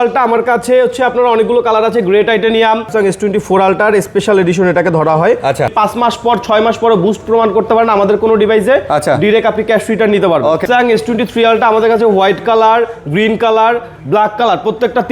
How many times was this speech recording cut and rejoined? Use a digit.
3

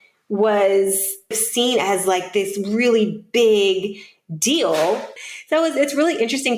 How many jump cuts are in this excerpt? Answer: 2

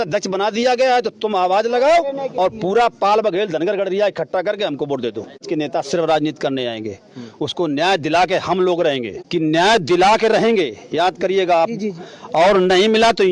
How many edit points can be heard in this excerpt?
2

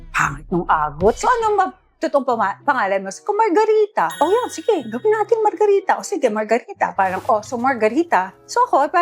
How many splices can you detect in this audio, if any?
2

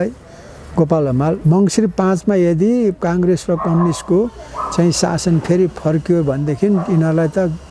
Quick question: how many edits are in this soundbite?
1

